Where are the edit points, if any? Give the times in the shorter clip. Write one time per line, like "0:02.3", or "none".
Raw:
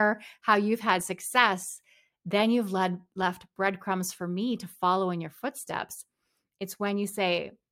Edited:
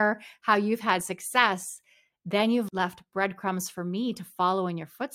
0:02.7